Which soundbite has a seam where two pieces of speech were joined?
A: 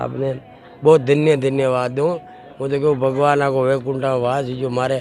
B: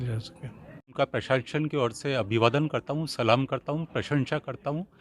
B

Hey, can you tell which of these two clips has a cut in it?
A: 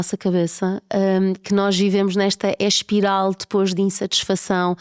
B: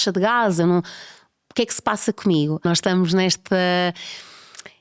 B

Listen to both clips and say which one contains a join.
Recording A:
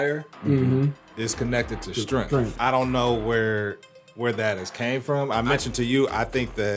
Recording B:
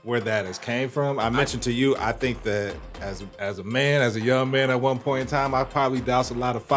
A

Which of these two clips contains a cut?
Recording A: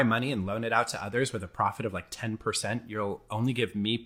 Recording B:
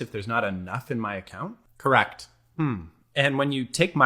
B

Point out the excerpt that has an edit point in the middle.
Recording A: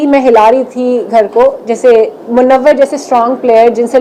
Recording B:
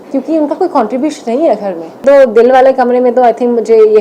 B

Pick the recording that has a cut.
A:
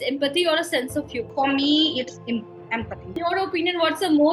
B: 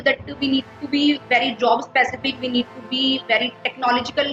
A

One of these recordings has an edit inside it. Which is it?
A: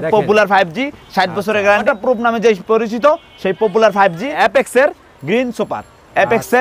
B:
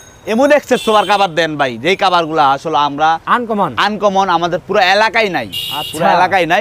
A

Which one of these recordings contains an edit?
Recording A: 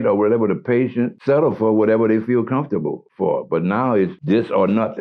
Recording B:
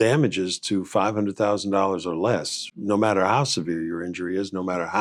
A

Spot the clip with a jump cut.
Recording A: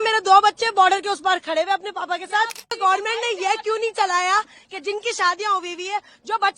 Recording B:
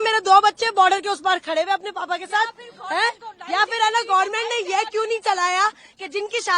A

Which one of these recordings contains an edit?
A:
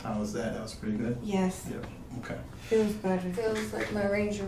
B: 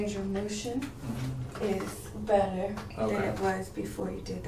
A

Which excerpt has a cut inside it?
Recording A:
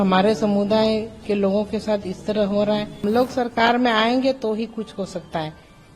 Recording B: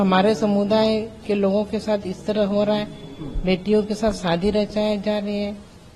A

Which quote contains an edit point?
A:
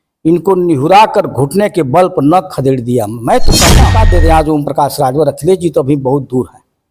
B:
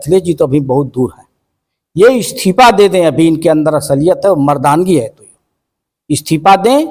A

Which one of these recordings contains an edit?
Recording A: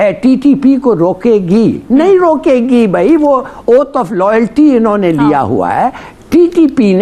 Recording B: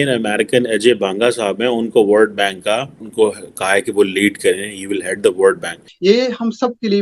B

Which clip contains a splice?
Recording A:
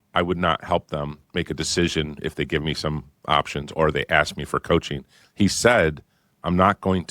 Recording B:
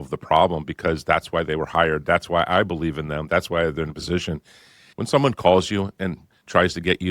B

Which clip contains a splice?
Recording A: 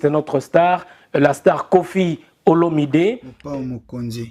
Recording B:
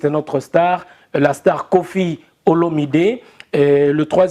A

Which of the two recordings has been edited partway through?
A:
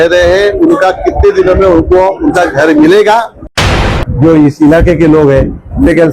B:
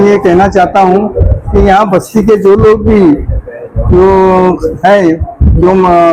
A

